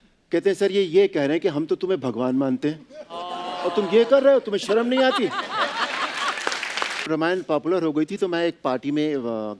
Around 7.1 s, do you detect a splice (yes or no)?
yes